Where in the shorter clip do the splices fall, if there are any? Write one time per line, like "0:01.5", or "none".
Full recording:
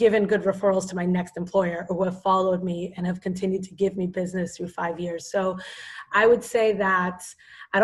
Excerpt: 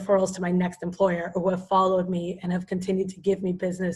none